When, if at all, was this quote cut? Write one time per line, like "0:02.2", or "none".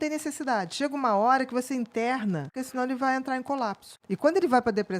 0:02.6
0:03.9